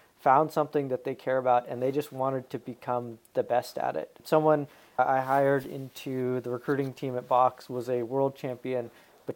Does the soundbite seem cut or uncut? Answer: cut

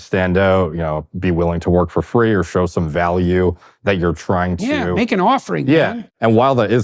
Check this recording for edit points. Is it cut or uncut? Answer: cut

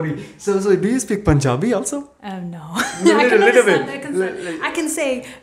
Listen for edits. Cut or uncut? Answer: uncut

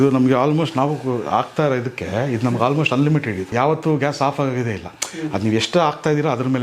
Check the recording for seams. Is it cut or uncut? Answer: cut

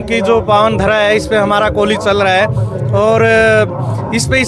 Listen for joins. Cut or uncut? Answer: uncut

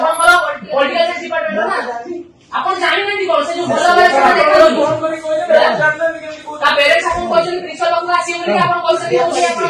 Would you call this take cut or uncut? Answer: uncut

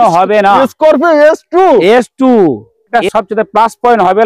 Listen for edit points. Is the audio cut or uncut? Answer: cut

